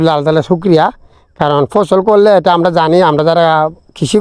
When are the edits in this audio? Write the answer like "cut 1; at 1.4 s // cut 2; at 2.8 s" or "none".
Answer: none